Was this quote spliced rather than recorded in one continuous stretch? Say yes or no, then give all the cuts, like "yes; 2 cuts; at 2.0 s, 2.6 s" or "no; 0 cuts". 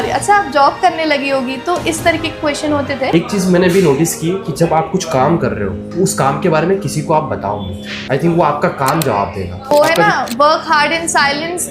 yes; 1 cut; at 3.1 s